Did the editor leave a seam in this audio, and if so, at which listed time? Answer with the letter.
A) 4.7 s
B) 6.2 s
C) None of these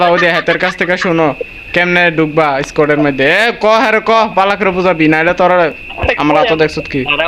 C